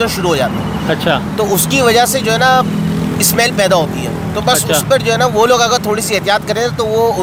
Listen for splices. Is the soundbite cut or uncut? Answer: uncut